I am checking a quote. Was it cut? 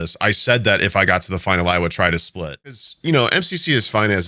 yes; 1 cut; at 2.8 s

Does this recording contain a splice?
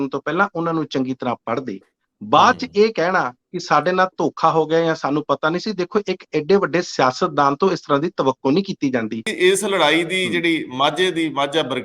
yes; 1 cut; at 9.3 s

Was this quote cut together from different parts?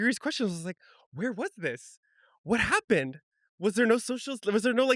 no; 0 cuts

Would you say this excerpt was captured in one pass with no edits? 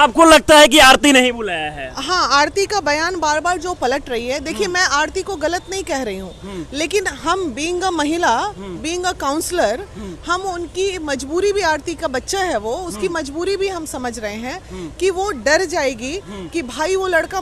yes; 0 cuts

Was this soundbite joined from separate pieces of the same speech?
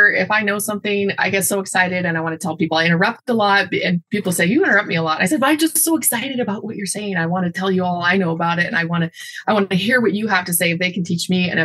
no; 0 cuts

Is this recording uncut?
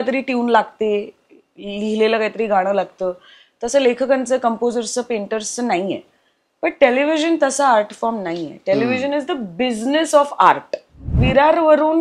no; 1 cut; at 11.1 s

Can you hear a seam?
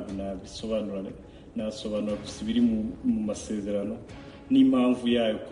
no; 0 cuts

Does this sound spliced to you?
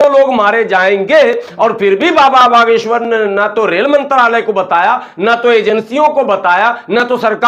no; 0 cuts

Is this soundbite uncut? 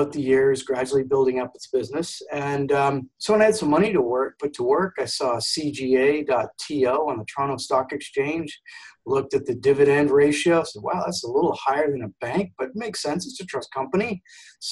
yes; 0 cuts

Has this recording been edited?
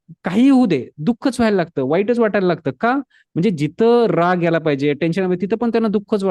no; 0 cuts

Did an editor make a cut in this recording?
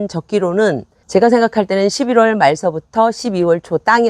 yes; 1 cut; at 0.9 s

